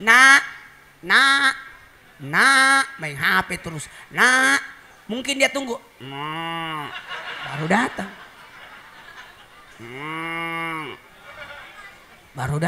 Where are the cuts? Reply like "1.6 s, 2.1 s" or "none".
9.6 s